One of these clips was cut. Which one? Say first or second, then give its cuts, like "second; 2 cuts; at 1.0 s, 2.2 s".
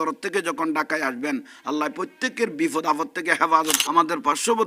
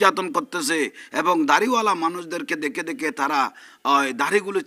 first; 1 cut; at 3.8 s